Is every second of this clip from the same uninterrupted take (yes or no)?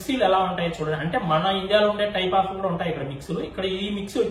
yes